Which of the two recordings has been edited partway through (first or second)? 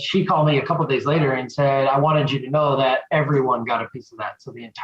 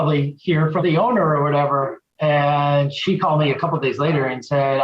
second